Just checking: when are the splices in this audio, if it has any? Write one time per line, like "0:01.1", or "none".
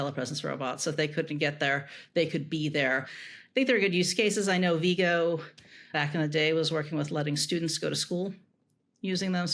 0:03.2
0:05.9